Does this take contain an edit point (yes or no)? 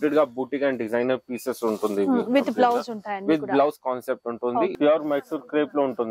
yes